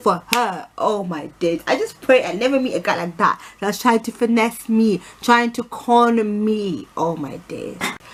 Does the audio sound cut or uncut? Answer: uncut